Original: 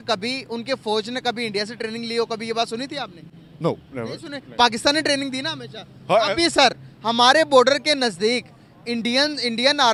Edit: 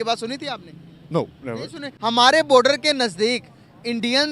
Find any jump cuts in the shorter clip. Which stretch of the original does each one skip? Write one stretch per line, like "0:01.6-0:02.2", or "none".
0:04.4-0:06.9